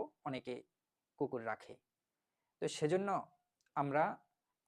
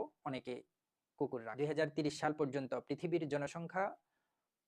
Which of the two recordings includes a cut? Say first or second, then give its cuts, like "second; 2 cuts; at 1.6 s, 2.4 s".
second; 1 cut; at 1.5 s